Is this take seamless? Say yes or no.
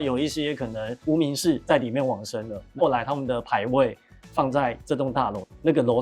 yes